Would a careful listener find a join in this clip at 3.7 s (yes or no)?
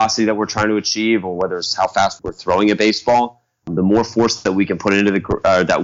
yes